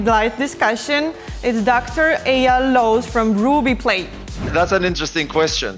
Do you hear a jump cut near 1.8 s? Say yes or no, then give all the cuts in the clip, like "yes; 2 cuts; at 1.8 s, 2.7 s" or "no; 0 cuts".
no; 1 cut; at 4.5 s